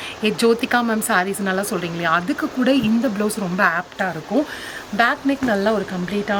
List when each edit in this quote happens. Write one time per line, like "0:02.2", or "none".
none